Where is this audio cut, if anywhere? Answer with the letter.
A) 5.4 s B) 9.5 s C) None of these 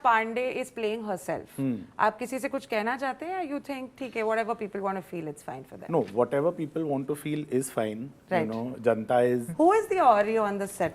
B